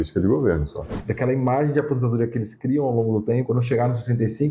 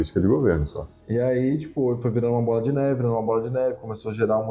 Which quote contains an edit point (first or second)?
first